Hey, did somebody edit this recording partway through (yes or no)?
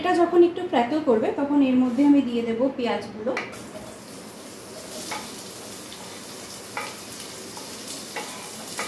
no